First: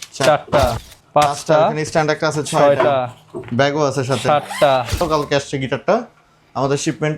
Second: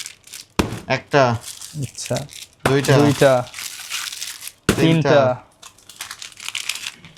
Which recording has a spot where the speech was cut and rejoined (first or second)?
first